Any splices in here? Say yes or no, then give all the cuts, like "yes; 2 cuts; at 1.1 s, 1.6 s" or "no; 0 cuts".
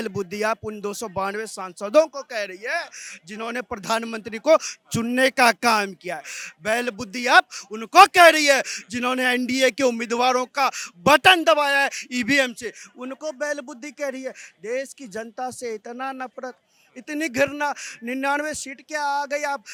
no; 0 cuts